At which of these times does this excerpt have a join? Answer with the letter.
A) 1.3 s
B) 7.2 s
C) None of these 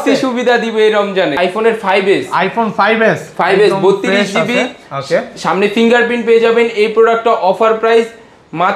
A